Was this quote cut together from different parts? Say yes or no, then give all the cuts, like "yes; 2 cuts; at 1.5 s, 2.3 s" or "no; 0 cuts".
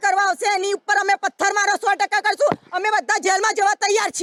no; 0 cuts